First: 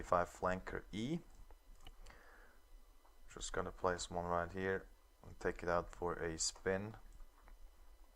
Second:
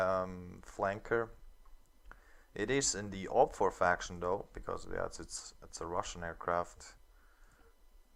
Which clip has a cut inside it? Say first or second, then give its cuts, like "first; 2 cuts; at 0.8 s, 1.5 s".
first; 1 cut; at 3.7 s